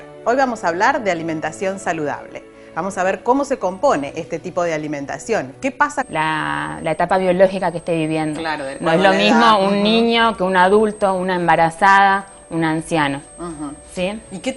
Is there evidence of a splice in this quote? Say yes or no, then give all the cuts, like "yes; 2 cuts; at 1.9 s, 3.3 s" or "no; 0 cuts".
no; 0 cuts